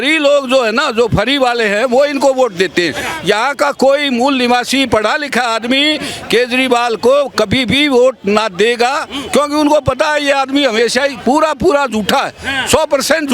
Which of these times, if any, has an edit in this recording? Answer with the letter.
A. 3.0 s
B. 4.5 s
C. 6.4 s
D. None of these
A